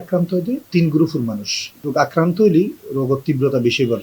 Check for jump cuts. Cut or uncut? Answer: cut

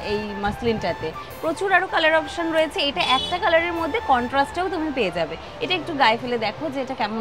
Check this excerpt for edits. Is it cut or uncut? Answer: uncut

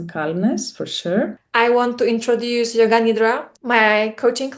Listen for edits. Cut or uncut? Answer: cut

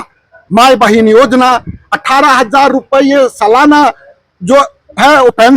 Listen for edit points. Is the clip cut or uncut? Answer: uncut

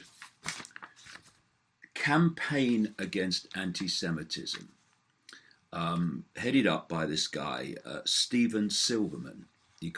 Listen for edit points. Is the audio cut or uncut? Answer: cut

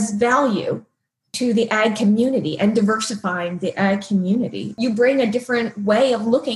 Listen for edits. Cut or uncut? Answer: cut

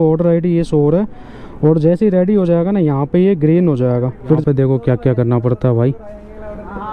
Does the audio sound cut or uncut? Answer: cut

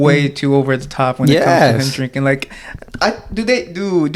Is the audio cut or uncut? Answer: uncut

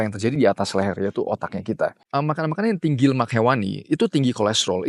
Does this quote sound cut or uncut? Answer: cut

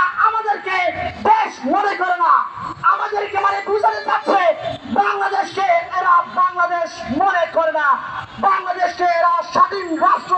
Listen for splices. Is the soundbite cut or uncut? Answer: uncut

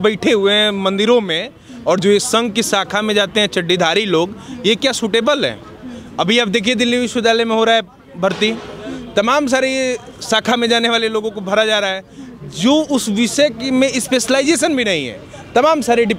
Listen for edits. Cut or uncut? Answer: uncut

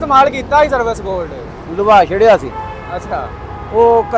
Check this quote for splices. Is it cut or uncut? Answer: uncut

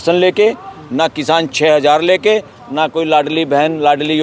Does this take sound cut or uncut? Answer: uncut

